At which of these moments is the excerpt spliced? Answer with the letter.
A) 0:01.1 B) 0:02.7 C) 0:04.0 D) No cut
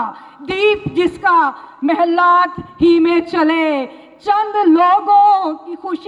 D